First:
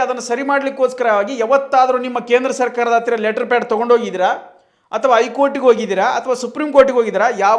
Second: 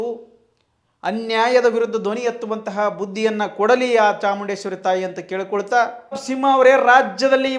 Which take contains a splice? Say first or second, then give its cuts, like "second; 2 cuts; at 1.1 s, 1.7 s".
second; 1 cut; at 6.2 s